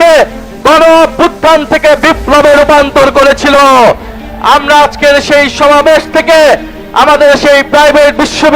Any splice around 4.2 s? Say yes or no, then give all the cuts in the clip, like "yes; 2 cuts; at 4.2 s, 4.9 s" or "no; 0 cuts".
no; 0 cuts